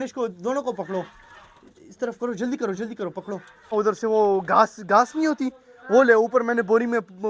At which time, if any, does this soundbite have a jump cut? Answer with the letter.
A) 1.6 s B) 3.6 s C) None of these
B